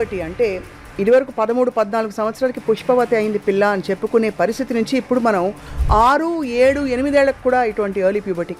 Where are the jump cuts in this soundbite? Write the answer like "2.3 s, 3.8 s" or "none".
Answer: none